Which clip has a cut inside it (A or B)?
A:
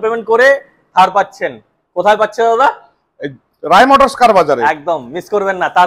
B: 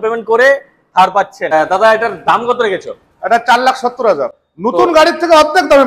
B